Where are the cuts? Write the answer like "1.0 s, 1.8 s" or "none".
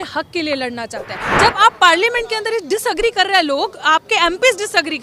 1.2 s

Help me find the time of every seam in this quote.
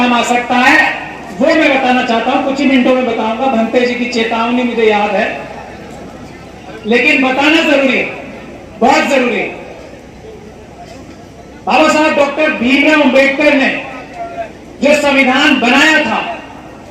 none

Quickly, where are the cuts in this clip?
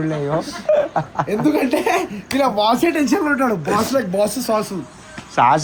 none

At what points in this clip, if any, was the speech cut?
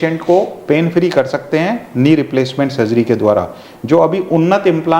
none

